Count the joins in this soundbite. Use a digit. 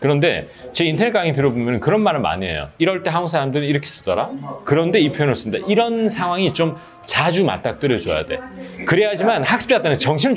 0